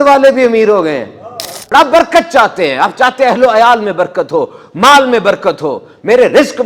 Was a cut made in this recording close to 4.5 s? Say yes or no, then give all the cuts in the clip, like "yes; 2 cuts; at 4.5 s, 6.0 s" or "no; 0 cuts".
no; 1 cut; at 1.5 s